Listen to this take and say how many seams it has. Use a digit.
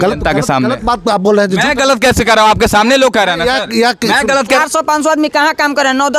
1